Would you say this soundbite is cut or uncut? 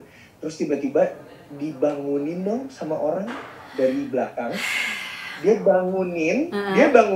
uncut